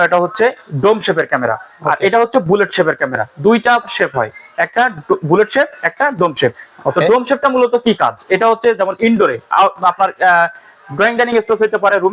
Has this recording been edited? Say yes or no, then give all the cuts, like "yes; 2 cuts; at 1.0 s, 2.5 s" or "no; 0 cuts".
no; 0 cuts